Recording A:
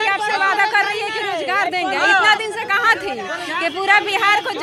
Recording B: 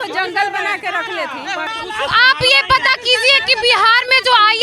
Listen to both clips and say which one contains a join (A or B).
B